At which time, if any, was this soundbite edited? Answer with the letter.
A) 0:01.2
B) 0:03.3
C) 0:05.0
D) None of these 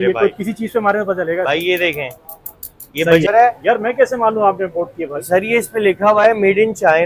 B